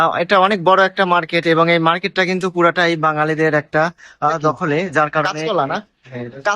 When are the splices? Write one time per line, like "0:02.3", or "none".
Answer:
0:05.2